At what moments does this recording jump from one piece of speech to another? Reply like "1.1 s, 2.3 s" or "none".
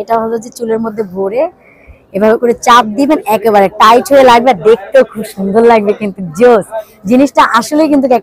none